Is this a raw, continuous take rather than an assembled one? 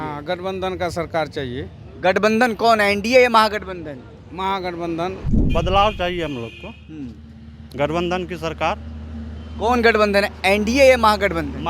no; 1 cut; at 5.3 s

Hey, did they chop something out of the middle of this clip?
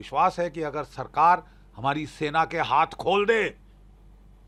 no; 0 cuts

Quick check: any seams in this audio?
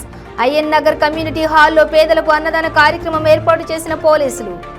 no; 0 cuts

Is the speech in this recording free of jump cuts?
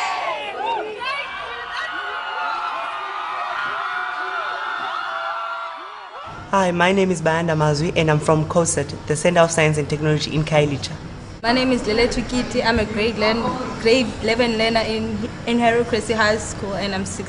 no; 1 cut; at 15.8 s

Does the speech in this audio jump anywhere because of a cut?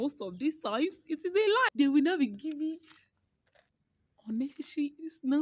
yes; 1 cut; at 1.7 s

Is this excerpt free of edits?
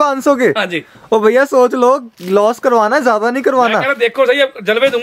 yes; 0 cuts

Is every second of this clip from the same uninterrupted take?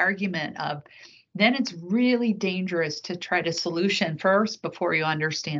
yes; 0 cuts

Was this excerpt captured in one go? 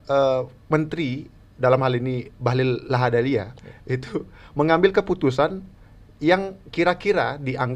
yes; 0 cuts

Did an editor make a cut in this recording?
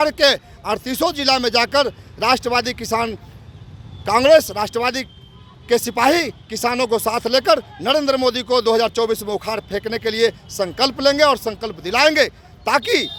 no; 0 cuts

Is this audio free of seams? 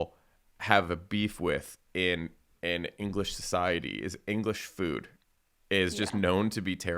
yes; 0 cuts

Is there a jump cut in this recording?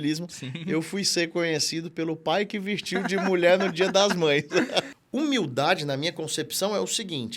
yes; 1 cut; at 5.0 s

